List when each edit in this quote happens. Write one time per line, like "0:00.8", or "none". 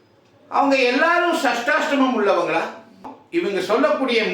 0:03.2